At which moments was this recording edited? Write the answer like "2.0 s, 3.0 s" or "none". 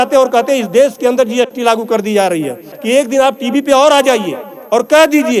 2.7 s